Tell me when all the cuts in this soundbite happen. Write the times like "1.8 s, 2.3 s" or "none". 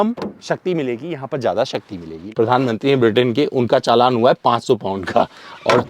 2.2 s